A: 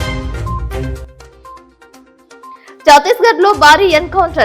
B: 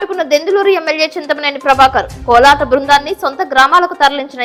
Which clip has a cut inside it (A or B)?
A